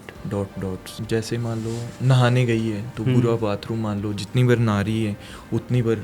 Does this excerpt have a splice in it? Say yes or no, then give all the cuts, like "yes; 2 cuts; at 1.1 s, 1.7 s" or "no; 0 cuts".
yes; 1 cut; at 0.9 s